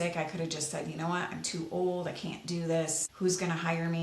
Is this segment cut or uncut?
cut